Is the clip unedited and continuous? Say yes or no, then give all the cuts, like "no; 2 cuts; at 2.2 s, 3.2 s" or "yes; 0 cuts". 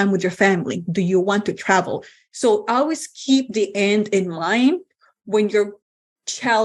yes; 0 cuts